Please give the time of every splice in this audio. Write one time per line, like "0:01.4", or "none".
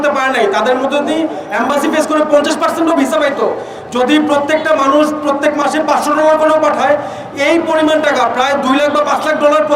none